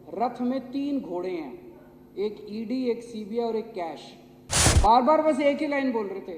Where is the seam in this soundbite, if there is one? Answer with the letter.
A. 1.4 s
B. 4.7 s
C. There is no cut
B